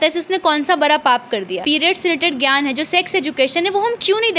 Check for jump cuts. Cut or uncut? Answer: cut